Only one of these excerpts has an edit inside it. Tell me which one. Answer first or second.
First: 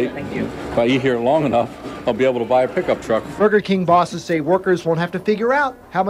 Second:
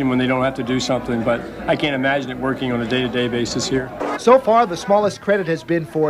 first